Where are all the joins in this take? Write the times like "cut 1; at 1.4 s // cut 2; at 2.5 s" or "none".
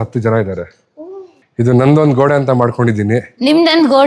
cut 1; at 1.3 s